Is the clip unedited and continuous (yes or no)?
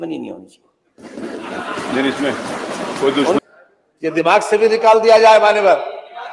no